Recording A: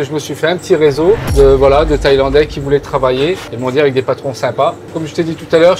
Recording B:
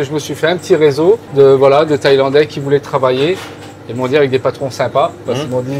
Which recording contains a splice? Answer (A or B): A